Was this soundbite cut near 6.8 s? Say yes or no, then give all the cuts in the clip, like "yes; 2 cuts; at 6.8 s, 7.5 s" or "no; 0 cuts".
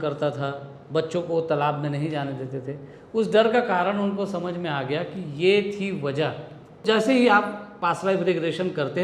yes; 1 cut; at 6.8 s